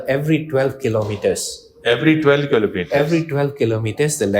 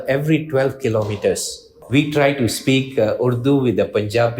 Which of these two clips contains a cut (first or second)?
second